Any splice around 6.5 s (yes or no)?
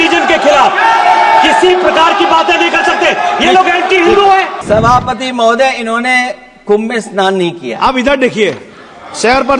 no